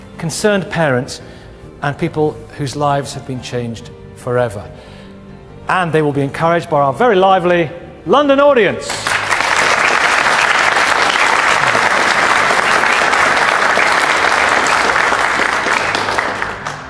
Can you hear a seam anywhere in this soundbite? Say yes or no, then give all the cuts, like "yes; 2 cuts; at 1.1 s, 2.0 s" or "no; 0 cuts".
yes; 1 cut; at 12.5 s